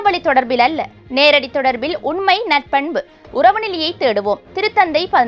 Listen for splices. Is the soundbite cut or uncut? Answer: uncut